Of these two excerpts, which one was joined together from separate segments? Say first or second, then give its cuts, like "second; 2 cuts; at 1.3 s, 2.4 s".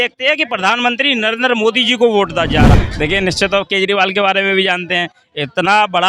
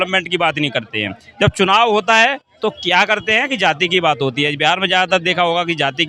first; 1 cut; at 2.7 s